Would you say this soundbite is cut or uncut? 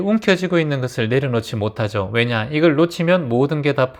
uncut